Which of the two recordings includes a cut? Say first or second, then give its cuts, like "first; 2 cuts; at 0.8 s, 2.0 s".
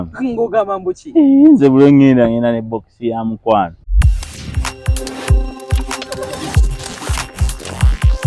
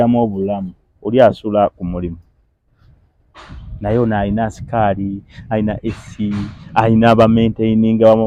first; 1 cut; at 3.8 s